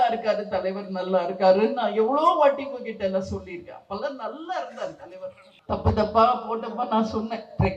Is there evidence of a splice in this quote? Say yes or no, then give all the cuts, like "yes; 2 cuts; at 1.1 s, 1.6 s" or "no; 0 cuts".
yes; 1 cut; at 5.5 s